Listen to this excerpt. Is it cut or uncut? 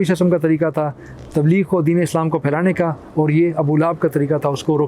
uncut